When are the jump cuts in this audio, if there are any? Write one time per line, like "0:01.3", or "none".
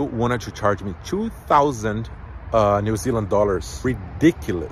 0:03.7